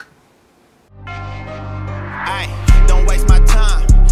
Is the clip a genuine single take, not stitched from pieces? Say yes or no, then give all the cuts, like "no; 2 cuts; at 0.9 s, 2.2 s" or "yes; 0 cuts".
no; 1 cut; at 1.0 s